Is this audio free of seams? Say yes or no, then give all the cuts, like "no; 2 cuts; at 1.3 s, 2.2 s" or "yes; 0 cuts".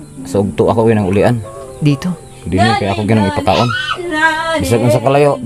yes; 0 cuts